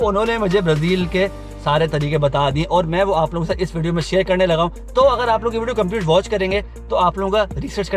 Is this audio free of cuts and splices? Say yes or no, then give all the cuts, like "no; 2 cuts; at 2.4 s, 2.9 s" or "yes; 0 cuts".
yes; 0 cuts